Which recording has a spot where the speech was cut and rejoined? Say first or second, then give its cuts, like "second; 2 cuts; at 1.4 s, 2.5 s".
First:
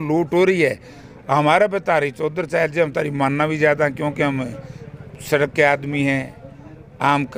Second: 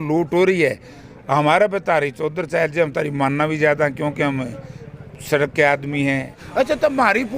second; 1 cut; at 6.4 s